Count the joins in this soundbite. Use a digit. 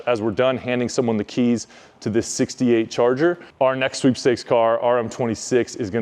1